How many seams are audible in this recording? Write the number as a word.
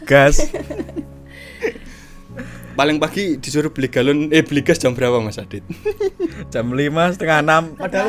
zero